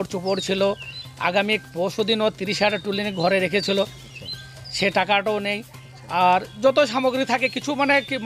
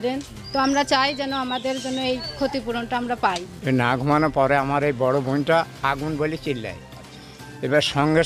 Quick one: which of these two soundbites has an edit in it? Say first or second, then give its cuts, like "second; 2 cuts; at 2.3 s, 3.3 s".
second; 1 cut; at 3.5 s